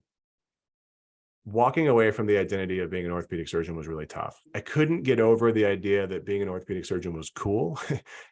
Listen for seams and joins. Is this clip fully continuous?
no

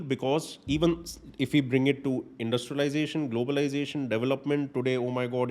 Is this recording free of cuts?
yes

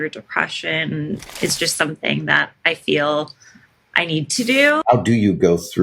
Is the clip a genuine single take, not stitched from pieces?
no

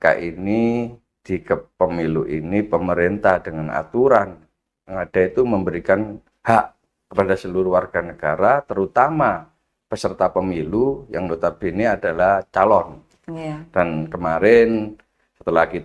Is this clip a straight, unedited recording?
yes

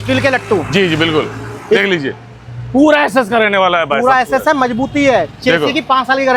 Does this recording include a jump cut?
no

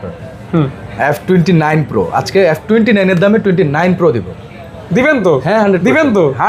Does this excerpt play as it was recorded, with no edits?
yes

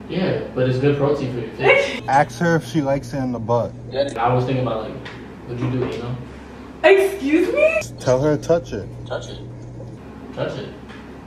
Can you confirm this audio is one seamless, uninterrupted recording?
no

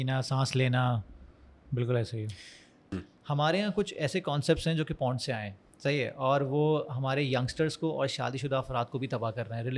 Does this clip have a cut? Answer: yes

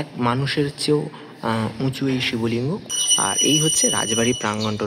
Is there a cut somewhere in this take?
yes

